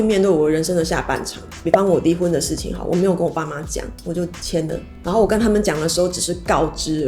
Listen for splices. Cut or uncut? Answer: uncut